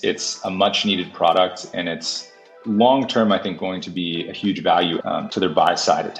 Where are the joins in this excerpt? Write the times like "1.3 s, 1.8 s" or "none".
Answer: 5.1 s